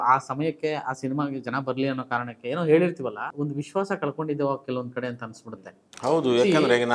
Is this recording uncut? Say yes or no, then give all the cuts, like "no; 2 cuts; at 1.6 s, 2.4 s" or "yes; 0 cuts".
no; 1 cut; at 3.3 s